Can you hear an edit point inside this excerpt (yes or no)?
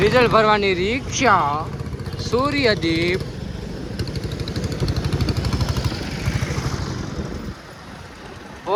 no